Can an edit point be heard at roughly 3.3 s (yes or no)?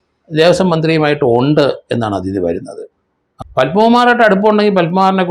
yes